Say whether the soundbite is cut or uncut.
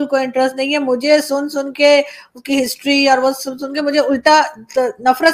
uncut